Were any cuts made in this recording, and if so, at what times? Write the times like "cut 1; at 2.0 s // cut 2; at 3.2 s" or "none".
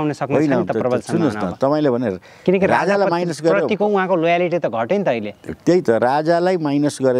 none

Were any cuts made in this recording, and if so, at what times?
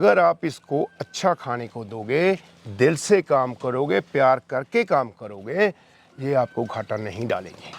none

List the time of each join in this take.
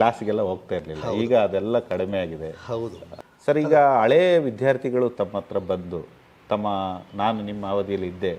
cut 1; at 3.0 s

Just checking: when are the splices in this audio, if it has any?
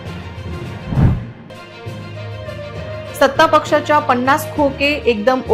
cut 1; at 0.8 s // cut 2; at 1.5 s // cut 3; at 3.1 s

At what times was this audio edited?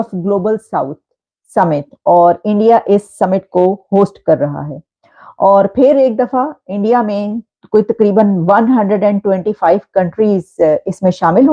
none

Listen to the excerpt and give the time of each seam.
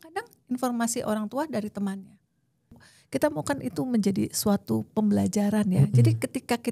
cut 1; at 2.8 s

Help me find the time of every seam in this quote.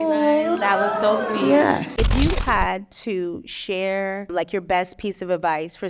cut 1; at 1.9 s

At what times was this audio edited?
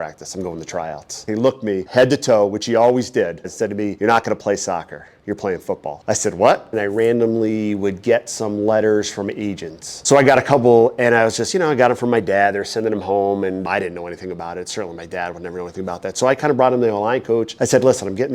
cut 1; at 1.2 s // cut 2; at 3.5 s // cut 3; at 6.7 s // cut 4; at 9.9 s

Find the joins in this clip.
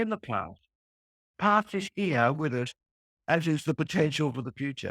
none

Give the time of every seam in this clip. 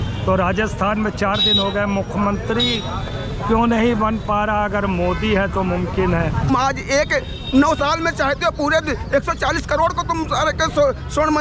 cut 1; at 6.5 s

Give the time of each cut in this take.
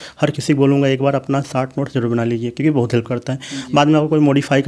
none

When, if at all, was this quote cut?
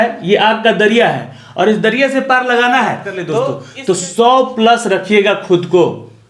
cut 1; at 3.6 s

